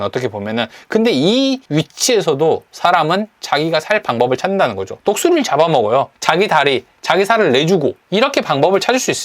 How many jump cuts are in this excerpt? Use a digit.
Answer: 3